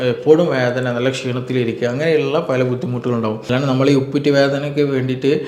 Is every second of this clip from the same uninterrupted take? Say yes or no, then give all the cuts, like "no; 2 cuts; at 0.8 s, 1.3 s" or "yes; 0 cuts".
no; 1 cut; at 3.5 s